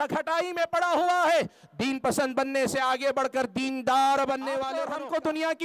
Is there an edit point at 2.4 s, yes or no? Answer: no